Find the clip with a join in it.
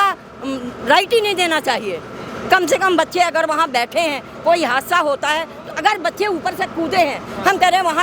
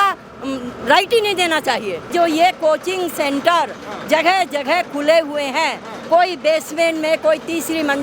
second; 1 cut; at 2.1 s

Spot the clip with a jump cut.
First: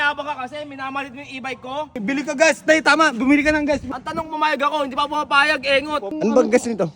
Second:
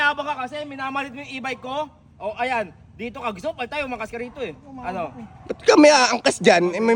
first; 3 cuts; at 2.0 s, 3.9 s, 6.1 s

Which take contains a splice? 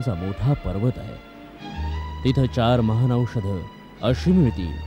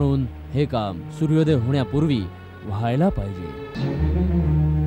second; 1 cut; at 3.7 s

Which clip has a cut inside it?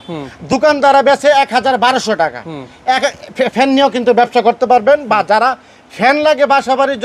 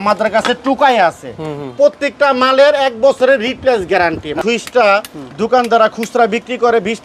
second; 1 cut; at 4.4 s

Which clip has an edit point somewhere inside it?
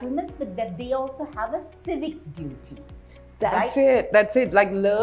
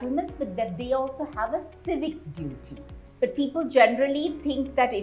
second; 1 cut; at 3.0 s

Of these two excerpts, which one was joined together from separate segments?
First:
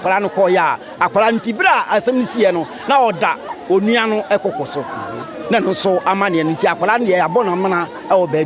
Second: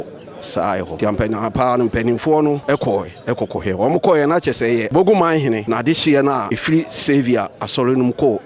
second; 5 cuts; at 0.9 s, 2.6 s, 4.9 s, 5.6 s, 6.5 s

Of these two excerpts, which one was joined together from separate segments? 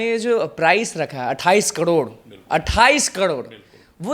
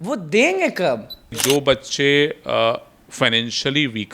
second; 1 cut; at 1.4 s

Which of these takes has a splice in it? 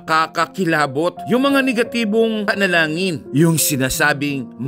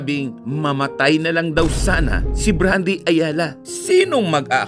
second; 1 cut; at 3.6 s

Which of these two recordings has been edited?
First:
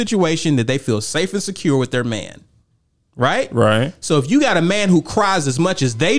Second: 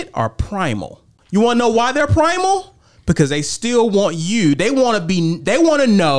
second; 1 cut; at 1.1 s

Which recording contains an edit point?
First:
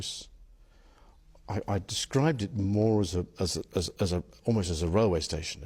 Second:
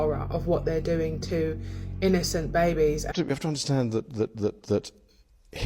second; 1 cut; at 3.1 s

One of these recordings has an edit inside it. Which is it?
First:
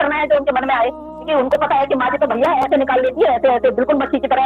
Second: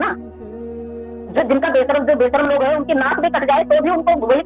first; 1 cut; at 1.1 s

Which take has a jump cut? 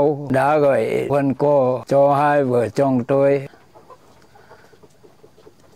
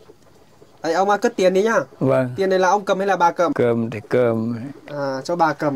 second; 1 cut; at 3.5 s

